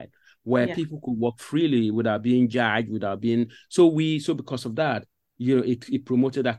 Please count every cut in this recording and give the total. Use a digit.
0